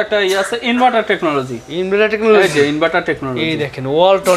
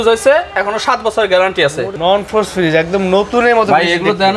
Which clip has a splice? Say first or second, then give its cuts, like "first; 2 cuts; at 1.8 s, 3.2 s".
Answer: second; 1 cut; at 1.9 s